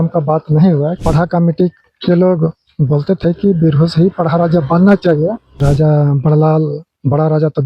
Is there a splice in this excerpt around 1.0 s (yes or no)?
yes